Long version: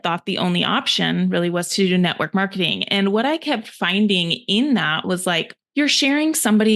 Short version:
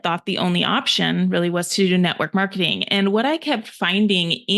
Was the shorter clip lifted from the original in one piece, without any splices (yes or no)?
yes